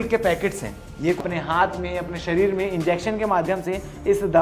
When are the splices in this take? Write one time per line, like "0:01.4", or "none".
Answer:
0:01.2